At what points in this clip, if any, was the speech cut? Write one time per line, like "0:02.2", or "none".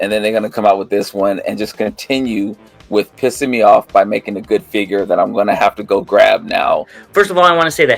0:07.0